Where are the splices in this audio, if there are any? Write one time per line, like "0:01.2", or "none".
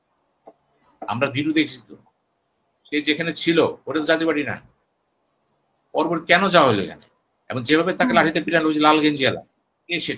none